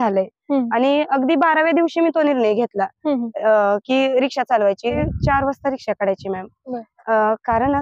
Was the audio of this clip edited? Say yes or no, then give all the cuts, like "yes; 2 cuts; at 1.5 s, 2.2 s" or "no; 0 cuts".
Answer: yes; 1 cut; at 5.0 s